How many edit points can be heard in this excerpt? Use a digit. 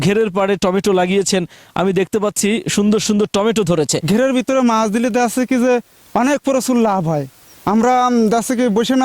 1